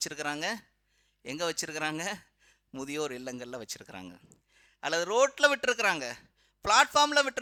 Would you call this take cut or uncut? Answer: uncut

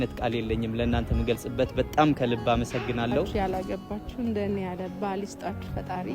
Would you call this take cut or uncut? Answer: cut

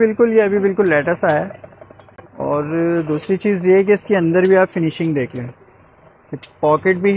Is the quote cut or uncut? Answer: uncut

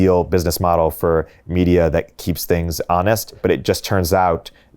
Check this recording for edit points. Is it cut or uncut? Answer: cut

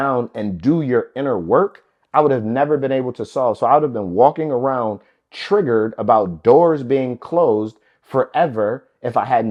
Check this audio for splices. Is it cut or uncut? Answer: uncut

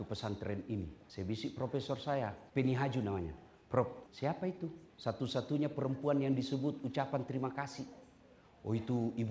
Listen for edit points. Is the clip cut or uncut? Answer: cut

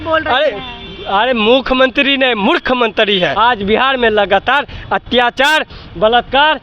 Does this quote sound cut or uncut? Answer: cut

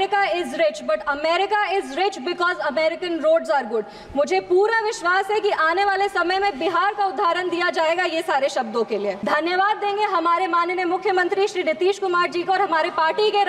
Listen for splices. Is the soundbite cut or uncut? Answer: cut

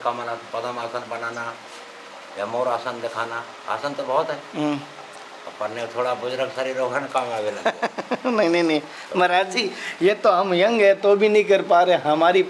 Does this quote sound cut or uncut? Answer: uncut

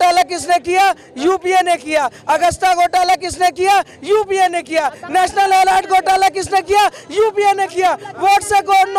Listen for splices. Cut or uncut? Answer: uncut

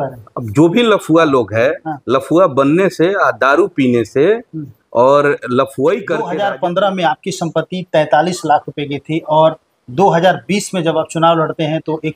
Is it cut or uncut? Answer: cut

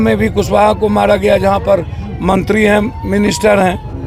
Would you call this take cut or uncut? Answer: uncut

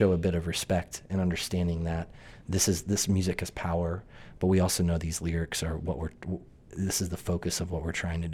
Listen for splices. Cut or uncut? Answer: uncut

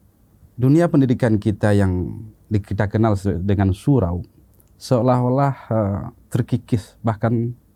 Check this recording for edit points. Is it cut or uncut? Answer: uncut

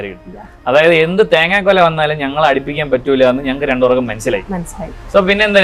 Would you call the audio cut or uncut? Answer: uncut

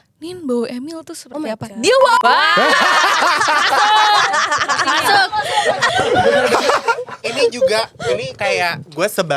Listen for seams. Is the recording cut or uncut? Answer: cut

